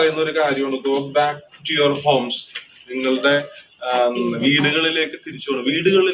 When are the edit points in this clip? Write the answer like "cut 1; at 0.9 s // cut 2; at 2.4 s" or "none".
none